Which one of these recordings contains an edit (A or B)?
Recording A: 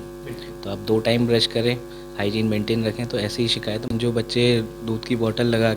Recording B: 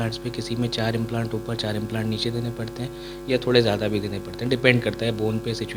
A